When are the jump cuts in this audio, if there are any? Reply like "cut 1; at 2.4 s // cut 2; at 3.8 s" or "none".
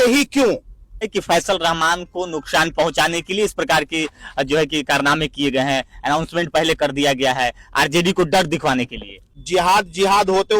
cut 1; at 1.1 s // cut 2; at 9.2 s